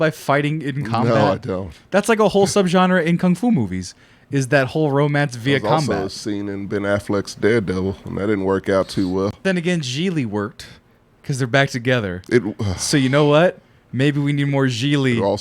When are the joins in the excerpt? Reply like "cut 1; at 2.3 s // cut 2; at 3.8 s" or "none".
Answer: cut 1; at 9.4 s